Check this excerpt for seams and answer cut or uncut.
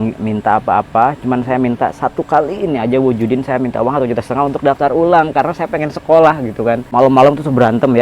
cut